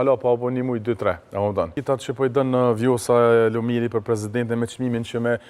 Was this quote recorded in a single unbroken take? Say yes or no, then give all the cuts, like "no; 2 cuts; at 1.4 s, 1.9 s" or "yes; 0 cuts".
no; 1 cut; at 1.8 s